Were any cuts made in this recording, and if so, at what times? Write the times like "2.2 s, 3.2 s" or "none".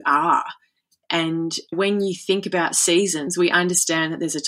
1.7 s, 3.3 s